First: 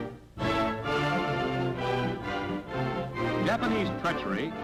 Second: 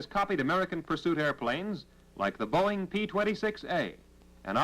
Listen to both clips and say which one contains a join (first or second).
second